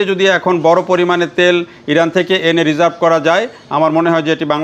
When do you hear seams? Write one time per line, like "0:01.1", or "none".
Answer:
none